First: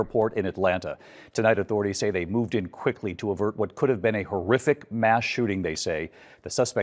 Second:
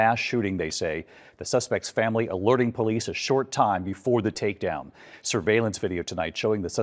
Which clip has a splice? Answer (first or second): second